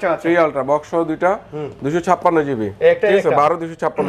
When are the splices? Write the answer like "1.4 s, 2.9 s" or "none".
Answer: none

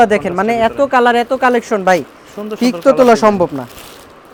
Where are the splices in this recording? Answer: none

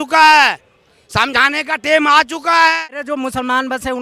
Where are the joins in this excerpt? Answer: 2.8 s

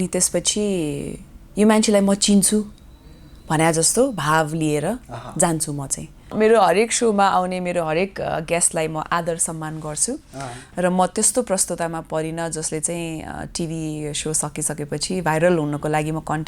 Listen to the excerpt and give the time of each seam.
6.3 s

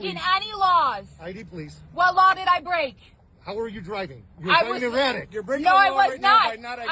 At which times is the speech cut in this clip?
5.7 s

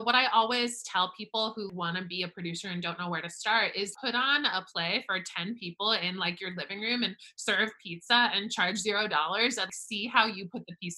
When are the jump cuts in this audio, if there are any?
1.7 s, 3.9 s, 9.8 s

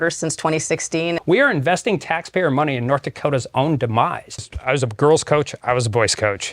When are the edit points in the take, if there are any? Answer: 1.2 s, 4.5 s

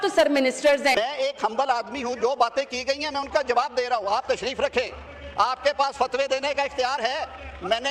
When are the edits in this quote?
0.9 s

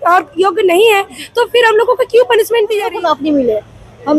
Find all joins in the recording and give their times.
2.8 s

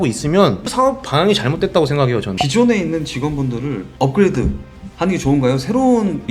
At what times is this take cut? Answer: 2.3 s

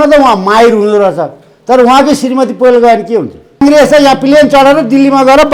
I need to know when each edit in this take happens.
3.6 s

